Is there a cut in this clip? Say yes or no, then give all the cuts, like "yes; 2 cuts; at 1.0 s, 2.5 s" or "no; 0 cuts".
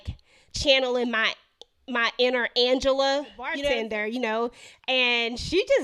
yes; 1 cut; at 3.6 s